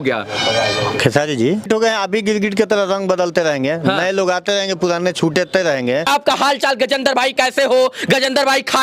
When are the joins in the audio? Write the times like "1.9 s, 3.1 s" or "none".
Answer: 1.7 s, 6.1 s